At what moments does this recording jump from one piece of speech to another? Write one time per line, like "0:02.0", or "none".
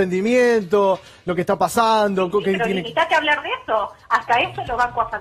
0:02.4